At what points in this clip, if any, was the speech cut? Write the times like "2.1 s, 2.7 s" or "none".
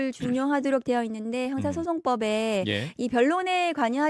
none